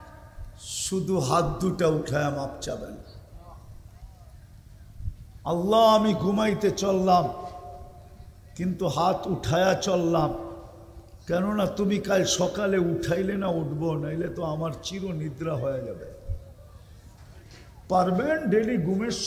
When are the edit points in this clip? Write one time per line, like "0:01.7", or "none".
none